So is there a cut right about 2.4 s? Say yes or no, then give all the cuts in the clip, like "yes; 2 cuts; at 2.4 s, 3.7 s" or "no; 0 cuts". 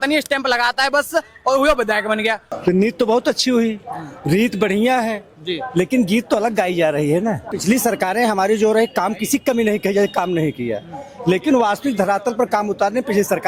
yes; 2 cuts; at 2.4 s, 7.5 s